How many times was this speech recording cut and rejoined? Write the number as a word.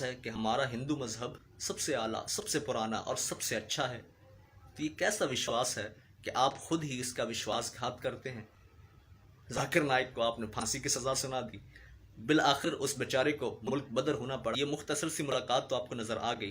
one